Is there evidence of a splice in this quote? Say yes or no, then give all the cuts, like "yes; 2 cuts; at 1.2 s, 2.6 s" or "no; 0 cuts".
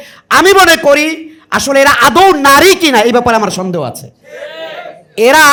no; 0 cuts